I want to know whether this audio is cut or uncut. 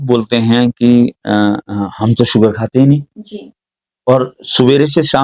uncut